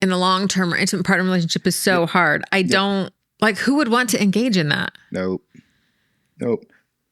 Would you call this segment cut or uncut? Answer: uncut